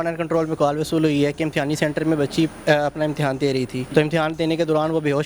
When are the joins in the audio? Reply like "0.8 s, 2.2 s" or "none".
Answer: 3.9 s